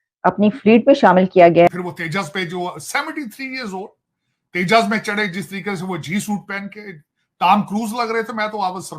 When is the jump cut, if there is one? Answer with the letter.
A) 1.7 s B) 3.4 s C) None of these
A